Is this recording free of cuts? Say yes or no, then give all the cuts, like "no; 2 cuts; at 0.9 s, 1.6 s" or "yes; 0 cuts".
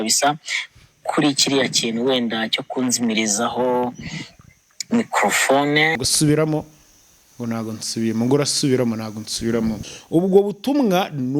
no; 2 cuts; at 6.0 s, 9.9 s